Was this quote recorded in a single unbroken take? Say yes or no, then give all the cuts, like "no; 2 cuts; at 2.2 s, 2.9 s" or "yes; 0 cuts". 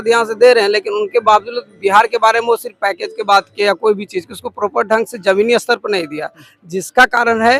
yes; 0 cuts